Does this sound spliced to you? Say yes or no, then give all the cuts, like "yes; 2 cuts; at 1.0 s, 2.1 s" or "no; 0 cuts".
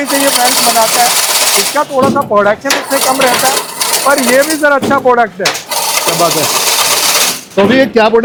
no; 0 cuts